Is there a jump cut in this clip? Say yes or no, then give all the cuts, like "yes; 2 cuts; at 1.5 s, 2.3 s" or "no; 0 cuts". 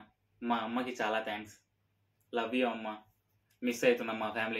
no; 0 cuts